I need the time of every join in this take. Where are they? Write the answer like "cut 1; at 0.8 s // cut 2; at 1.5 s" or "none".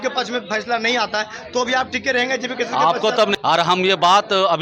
cut 1; at 3.4 s